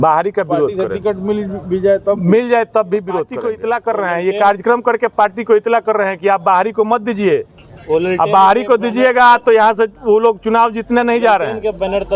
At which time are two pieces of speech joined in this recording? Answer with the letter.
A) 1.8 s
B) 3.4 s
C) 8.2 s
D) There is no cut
B